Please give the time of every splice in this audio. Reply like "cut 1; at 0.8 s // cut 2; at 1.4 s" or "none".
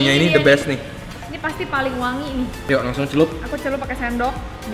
cut 1; at 2.6 s